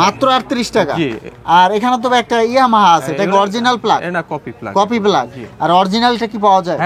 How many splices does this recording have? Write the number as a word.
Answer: zero